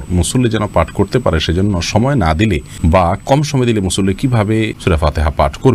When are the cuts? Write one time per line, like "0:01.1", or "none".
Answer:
0:02.7
0:04.8

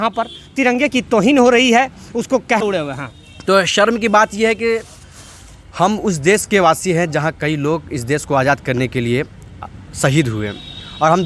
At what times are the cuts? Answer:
0:02.6

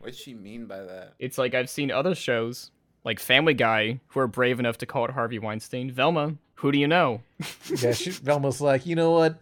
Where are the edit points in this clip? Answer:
0:06.4

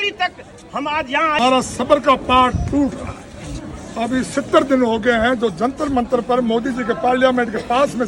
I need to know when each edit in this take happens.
0:01.4

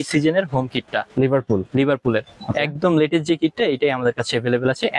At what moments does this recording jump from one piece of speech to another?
none

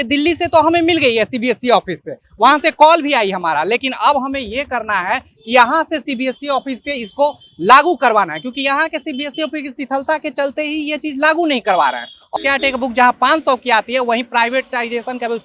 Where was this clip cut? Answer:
0:12.2

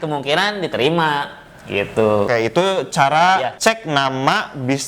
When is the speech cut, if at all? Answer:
0:02.3
0:03.5

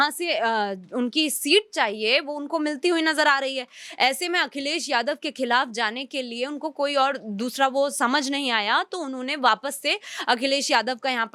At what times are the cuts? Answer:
none

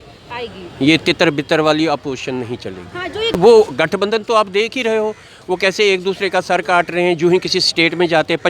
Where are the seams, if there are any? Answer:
0:03.3

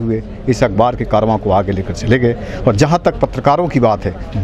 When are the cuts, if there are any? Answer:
none

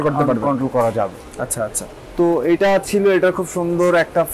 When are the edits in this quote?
none

